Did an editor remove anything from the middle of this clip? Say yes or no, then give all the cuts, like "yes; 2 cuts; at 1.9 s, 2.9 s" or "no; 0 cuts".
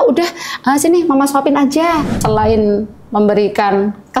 yes; 1 cut; at 2.1 s